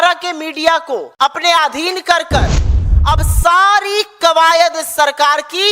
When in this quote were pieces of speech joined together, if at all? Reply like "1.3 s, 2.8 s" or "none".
1.1 s

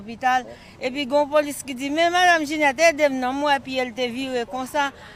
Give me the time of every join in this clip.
none

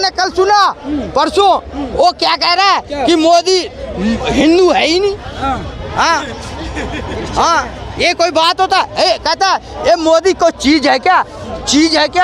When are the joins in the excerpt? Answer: none

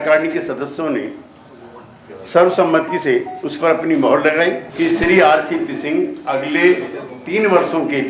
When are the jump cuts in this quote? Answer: 4.7 s

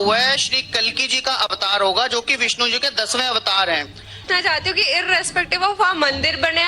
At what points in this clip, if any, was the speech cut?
4.2 s

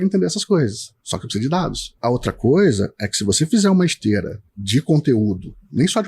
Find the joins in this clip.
1.9 s

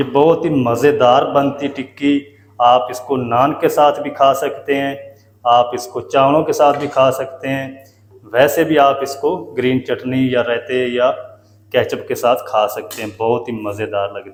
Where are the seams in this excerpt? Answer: none

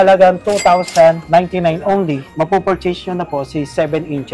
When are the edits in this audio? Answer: 1.2 s, 2.3 s

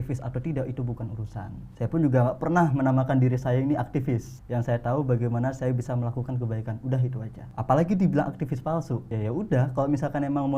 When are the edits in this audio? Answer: 1.6 s, 4.3 s, 7.4 s, 9.1 s

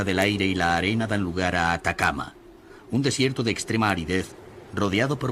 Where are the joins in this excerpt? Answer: 4.0 s

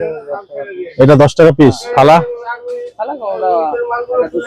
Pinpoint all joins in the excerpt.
1.8 s

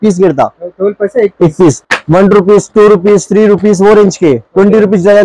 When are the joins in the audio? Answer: 1.9 s

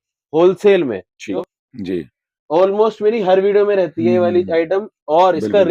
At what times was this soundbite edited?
1.3 s

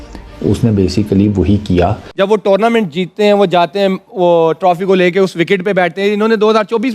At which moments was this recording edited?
2.0 s

